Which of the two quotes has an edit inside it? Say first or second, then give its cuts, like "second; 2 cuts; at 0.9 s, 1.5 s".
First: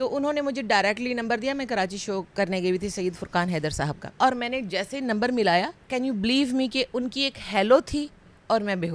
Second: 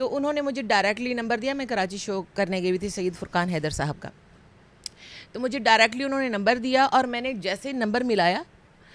first; 2 cuts; at 4.2 s, 5.8 s